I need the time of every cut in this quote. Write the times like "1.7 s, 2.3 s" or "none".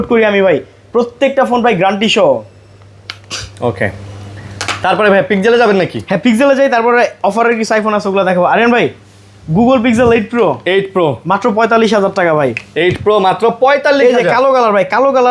none